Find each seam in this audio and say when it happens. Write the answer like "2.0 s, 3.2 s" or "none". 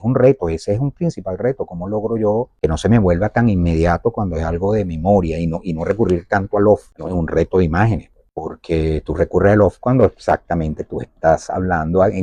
none

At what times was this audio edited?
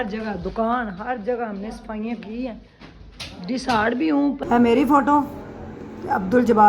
4.4 s

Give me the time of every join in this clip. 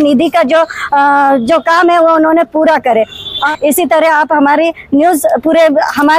3.5 s

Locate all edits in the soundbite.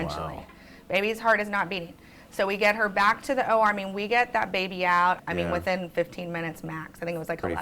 5.2 s

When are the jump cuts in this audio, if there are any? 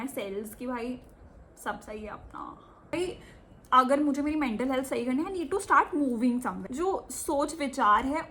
2.9 s, 6.6 s

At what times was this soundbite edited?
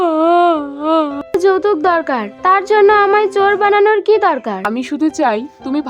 1.3 s, 4.7 s

